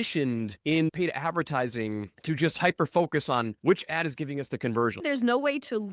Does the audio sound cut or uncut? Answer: cut